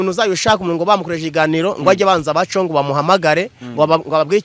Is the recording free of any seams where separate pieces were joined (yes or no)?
yes